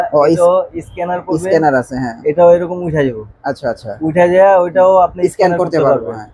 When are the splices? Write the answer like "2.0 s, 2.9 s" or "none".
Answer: none